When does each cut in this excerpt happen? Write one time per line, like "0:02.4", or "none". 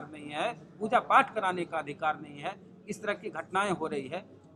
none

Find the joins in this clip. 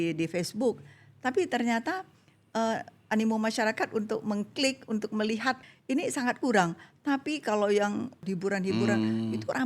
0:05.7
0:08.3

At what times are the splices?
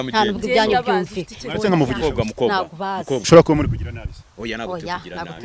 0:03.3

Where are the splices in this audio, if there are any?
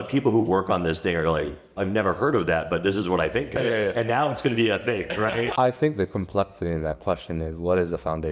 0:01.6
0:03.6
0:05.5

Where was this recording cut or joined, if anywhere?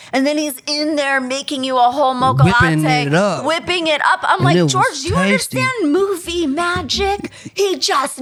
none

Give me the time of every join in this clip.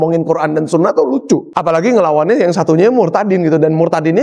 0:01.5

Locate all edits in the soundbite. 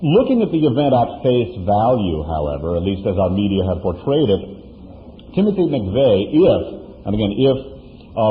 0:01.8

